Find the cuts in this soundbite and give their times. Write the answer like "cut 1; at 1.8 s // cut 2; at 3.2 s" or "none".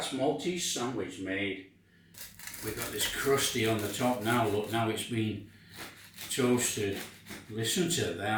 none